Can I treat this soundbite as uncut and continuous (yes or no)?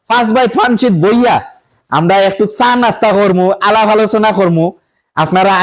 yes